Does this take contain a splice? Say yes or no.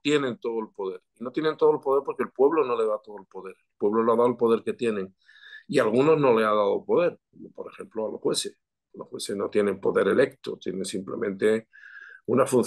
no